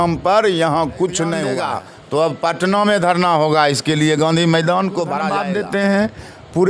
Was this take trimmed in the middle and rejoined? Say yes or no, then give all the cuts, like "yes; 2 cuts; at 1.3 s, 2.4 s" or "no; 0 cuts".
yes; 2 cuts; at 1.6 s, 5.4 s